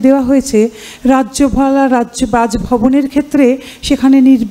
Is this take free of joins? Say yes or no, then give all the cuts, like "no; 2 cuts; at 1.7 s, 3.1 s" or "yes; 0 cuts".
yes; 0 cuts